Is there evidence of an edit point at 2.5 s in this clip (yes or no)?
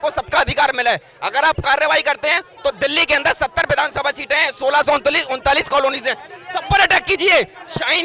no